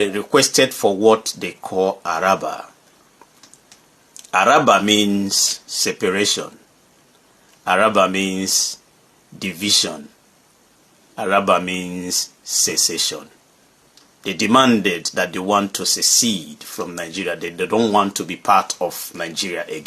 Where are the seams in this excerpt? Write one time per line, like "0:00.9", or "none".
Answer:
none